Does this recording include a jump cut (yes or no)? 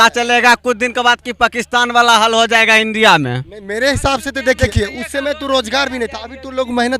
no